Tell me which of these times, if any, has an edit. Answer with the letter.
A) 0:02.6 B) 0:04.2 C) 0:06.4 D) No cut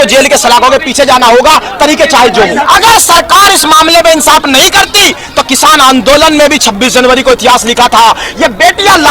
A